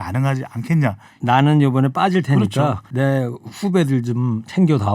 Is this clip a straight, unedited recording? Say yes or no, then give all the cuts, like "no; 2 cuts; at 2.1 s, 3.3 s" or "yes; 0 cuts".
no; 2 cuts; at 1.1 s, 2.8 s